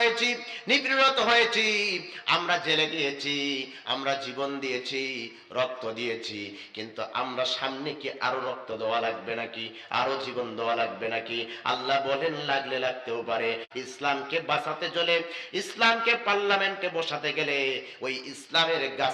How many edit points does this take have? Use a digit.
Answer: 1